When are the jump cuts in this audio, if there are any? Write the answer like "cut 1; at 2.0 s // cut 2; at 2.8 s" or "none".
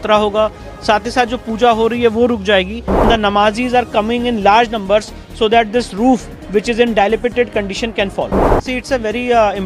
cut 1; at 2.9 s // cut 2; at 8.5 s